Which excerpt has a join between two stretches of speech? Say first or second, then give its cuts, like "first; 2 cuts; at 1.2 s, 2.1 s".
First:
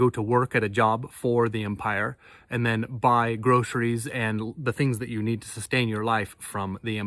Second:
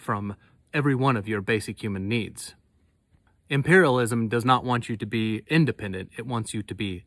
second; 1 cut; at 2.8 s